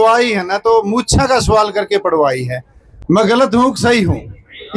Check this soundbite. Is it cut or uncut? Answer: uncut